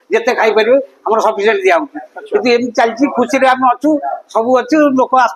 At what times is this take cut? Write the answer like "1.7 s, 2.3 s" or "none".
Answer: none